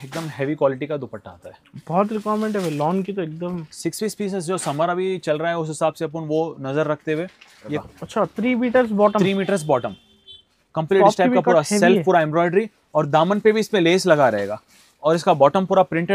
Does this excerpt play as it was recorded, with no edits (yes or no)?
no